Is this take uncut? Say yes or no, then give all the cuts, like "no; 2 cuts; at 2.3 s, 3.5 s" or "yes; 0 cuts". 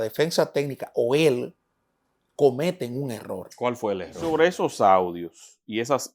no; 1 cut; at 4.1 s